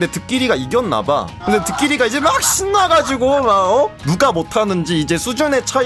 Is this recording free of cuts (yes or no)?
yes